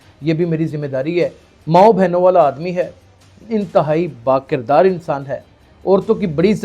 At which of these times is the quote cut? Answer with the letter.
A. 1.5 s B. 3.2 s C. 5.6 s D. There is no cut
A